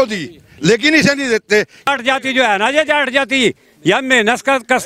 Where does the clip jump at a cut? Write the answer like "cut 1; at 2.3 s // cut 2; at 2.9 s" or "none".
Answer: cut 1; at 1.9 s